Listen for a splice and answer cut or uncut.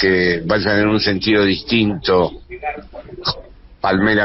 uncut